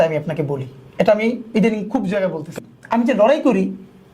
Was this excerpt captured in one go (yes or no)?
no